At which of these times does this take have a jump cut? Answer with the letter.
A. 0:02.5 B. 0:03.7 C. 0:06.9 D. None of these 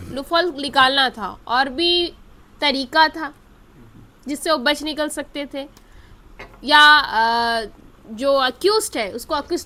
D